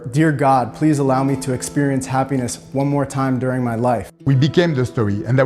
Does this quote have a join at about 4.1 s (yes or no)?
yes